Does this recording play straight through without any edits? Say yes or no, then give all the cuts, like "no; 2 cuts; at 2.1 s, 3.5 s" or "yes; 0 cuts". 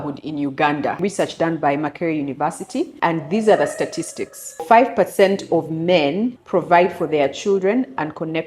no; 4 cuts; at 1.0 s, 2.9 s, 4.6 s, 6.4 s